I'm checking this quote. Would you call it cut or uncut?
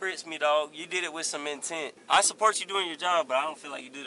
cut